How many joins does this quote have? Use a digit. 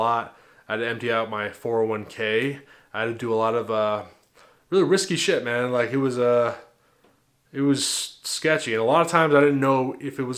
0